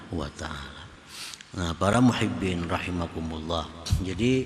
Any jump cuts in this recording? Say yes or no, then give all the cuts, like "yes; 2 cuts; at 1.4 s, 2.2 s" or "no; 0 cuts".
no; 0 cuts